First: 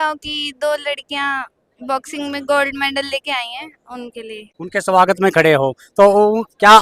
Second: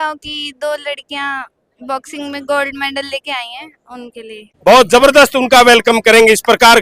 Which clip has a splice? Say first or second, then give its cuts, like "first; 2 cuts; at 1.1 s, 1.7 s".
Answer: second; 1 cut; at 4.5 s